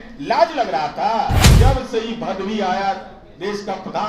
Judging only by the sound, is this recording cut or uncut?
cut